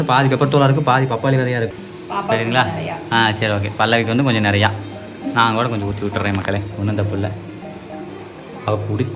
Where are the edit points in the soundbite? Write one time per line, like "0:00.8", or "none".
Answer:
0:01.7

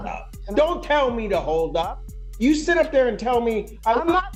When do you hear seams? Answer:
none

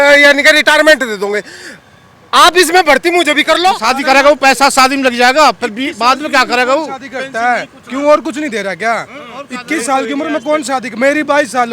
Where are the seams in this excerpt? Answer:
0:03.8

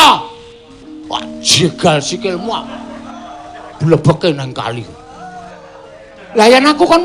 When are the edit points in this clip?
0:04.2

